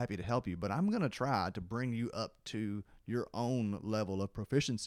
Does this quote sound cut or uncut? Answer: uncut